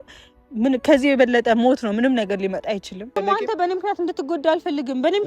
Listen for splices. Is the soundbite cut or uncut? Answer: cut